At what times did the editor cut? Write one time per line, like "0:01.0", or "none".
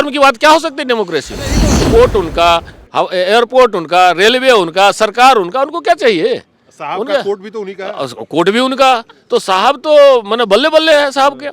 0:01.6